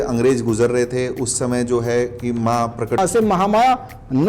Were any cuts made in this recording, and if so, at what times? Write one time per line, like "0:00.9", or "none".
0:03.0